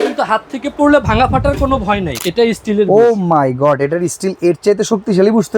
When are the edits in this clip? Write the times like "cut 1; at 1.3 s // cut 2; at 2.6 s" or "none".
cut 1; at 2.2 s